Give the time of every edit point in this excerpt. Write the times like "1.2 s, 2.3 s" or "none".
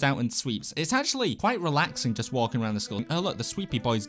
1.4 s, 3.0 s